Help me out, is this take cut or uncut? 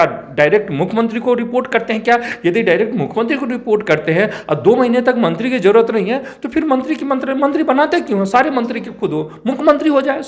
uncut